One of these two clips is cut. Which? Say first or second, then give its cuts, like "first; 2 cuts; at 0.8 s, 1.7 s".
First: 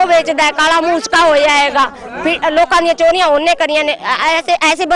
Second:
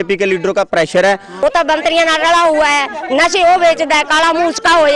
second; 1 cut; at 1.4 s